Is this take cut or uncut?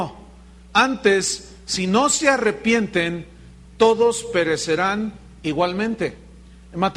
uncut